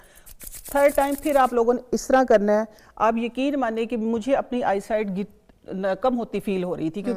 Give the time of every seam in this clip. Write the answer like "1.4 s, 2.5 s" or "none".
none